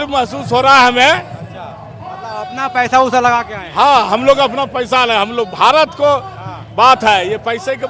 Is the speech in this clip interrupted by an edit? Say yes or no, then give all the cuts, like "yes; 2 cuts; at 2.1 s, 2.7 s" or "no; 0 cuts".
no; 0 cuts